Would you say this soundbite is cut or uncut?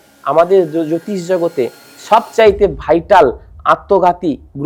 uncut